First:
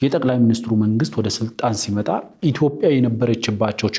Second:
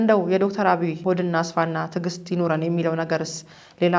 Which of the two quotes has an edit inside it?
second; 1 cut; at 1.0 s

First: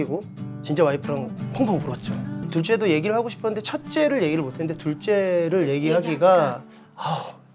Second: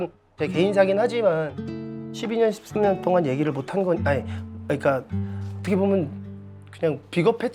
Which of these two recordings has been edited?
first; 1 cut; at 2.5 s

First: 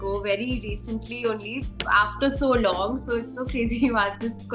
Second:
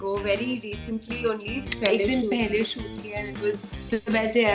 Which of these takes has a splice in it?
second; 1 cut; at 1.8 s

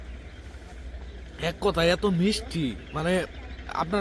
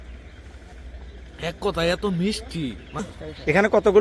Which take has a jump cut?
second; 1 cut; at 3.0 s

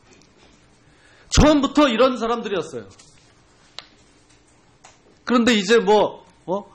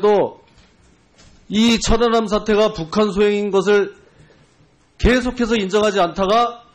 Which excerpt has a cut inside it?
second; 1 cut; at 3.7 s

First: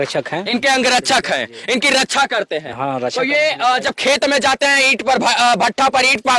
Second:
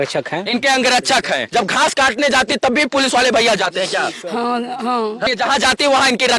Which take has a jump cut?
second; 2 cuts; at 1.4 s, 5.3 s

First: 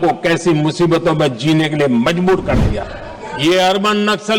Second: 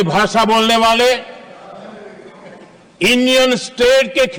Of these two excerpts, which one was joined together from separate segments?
first; 1 cut; at 2.8 s

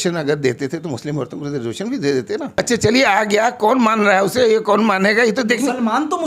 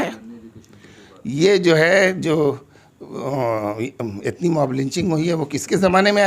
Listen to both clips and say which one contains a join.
first; 1 cut; at 2.5 s

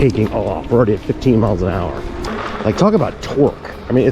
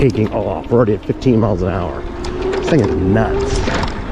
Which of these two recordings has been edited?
first; 1 cut; at 2.3 s

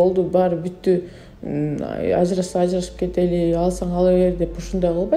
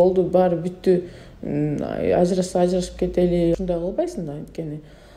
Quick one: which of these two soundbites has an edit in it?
second; 1 cut; at 3.6 s

